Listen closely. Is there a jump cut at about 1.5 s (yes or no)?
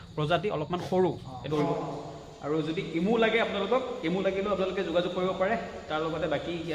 yes